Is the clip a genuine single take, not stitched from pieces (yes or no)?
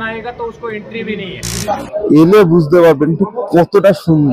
no